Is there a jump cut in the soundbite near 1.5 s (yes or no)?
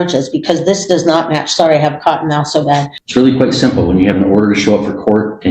no